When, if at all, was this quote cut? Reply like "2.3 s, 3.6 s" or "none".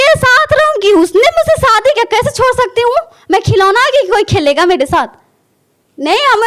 none